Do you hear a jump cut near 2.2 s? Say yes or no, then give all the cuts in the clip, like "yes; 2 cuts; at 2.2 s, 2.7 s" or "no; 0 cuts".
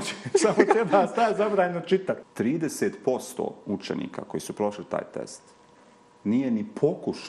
yes; 1 cut; at 2.2 s